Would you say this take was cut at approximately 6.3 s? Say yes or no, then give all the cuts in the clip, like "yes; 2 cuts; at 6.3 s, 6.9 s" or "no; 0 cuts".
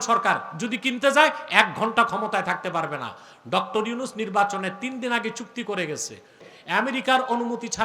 yes; 1 cut; at 6.3 s